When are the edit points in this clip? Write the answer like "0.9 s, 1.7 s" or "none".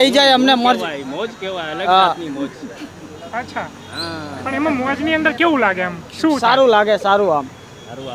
none